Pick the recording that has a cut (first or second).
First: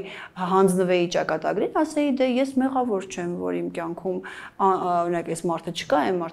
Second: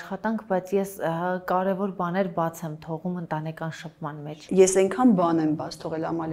second